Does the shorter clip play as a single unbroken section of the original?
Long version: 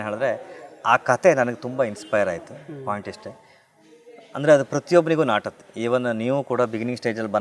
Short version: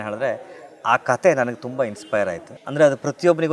no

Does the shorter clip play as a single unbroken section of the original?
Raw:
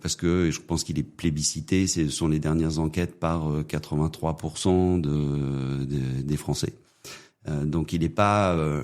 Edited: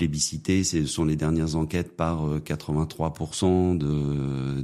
yes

